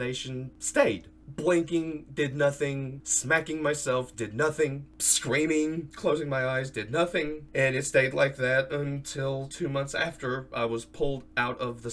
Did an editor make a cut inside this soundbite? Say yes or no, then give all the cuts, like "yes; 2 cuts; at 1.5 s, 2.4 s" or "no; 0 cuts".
no; 0 cuts